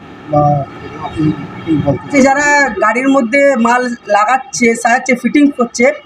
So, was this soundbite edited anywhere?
yes; 1 cut; at 2.1 s

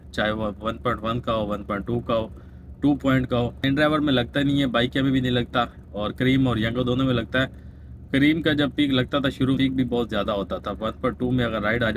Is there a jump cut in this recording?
yes; 2 cuts; at 3.6 s, 9.6 s

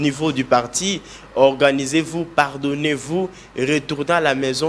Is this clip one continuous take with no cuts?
yes; 0 cuts

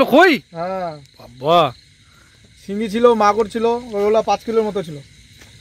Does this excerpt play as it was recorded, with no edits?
yes; 0 cuts

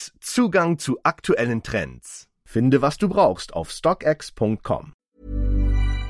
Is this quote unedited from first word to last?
no; 1 cut; at 4.9 s

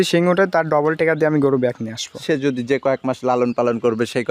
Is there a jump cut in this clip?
no; 0 cuts

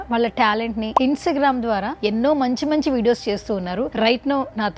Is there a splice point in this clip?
yes; 2 cuts; at 0.9 s, 2.0 s

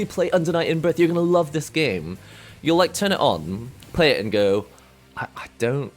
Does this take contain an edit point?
no; 0 cuts

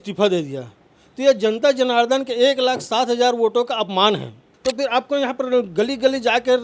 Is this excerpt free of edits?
no; 1 cut; at 4.5 s

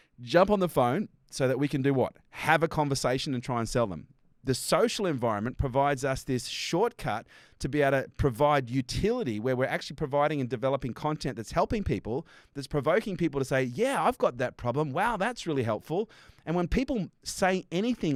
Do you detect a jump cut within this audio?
no; 0 cuts

